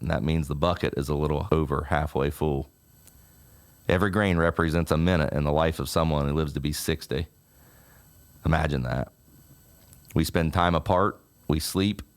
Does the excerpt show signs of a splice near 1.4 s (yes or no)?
yes